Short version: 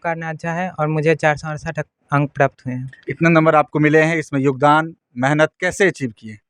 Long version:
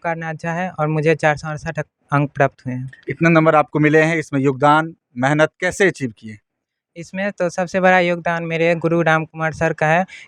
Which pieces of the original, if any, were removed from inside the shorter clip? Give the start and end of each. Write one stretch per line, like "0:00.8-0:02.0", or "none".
none